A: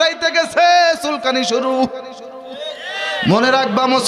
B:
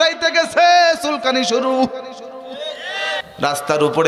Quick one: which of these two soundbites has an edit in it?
B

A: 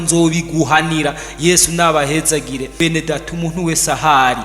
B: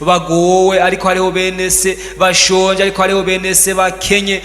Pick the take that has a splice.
A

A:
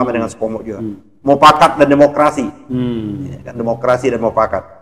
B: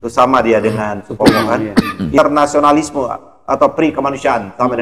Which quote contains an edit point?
B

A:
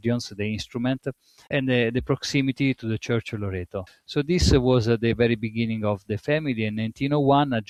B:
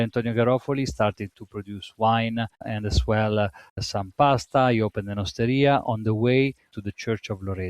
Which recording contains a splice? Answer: B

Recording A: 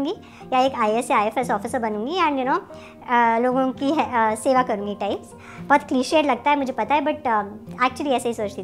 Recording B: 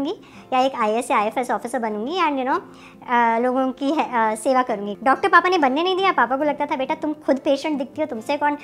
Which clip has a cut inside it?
B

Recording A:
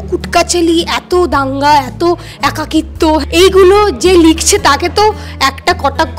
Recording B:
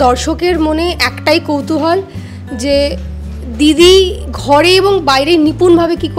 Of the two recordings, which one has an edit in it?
A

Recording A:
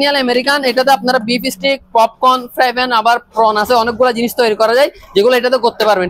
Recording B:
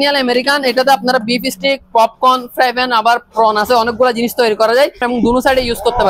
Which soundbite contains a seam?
B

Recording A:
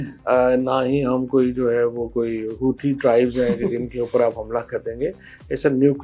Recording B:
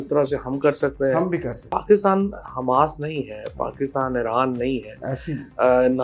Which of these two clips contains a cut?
B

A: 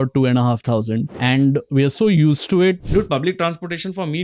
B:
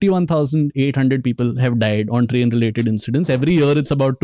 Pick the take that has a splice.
A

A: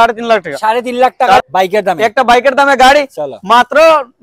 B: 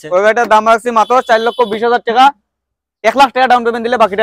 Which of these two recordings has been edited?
A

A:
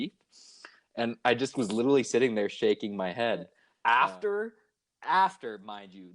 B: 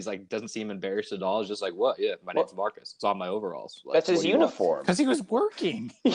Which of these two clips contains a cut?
A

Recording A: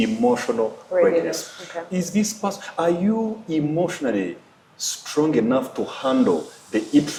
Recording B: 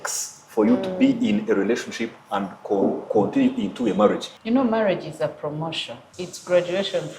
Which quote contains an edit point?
B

